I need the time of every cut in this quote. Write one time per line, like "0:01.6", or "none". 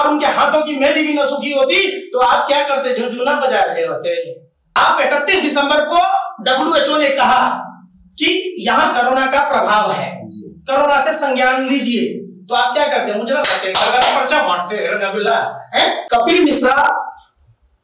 0:04.6
0:16.0